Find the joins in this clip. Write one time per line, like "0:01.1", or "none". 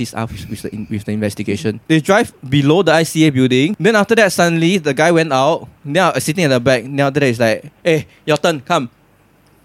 0:01.7
0:03.8